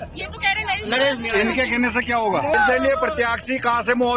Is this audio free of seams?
no; 1 cut; at 2.5 s

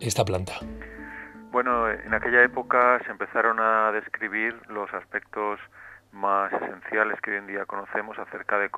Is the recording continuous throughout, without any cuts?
yes; 0 cuts

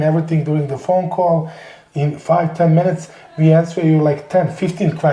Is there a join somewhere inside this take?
no; 0 cuts

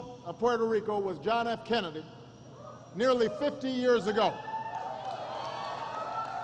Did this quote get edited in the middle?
yes; 1 cut; at 5.0 s

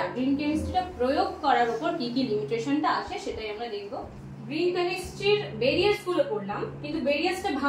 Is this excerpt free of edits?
no; 1 cut; at 4.3 s

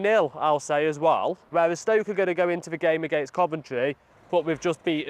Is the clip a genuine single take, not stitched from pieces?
no; 2 cuts; at 1.4 s, 4.1 s

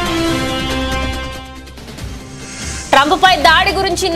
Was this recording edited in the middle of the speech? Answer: yes; 2 cuts; at 1.3 s, 2.7 s

